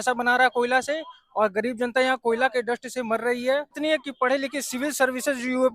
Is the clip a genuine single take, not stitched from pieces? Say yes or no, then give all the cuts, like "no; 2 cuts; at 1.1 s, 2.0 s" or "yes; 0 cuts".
no; 1 cut; at 3.8 s